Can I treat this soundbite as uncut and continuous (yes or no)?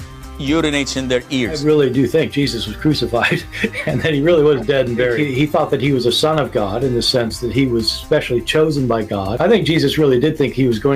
yes